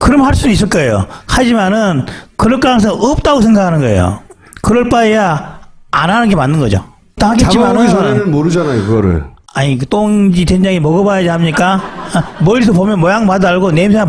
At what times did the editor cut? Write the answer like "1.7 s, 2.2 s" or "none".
none